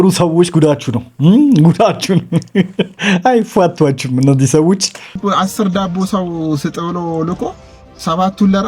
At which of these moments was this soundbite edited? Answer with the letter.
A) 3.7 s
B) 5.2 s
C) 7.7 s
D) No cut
B